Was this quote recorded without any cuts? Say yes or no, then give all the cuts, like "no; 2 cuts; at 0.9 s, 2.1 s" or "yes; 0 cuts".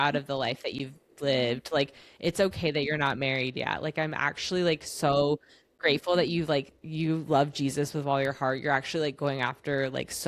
yes; 0 cuts